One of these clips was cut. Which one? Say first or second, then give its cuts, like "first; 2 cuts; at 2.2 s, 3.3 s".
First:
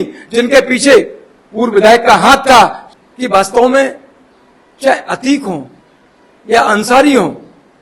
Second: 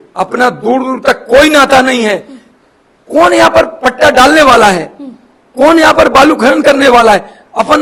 first; 1 cut; at 2.8 s